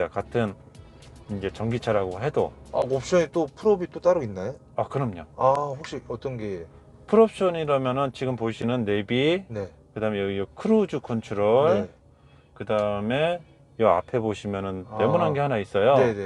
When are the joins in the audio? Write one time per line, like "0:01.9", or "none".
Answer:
none